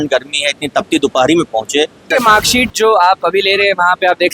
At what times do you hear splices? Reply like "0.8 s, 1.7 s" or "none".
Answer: 2.1 s